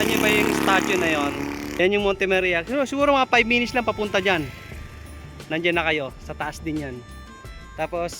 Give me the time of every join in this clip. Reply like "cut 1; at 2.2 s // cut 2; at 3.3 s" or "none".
cut 1; at 1.8 s